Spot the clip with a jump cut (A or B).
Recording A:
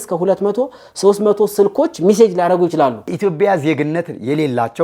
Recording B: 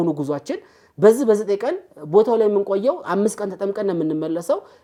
A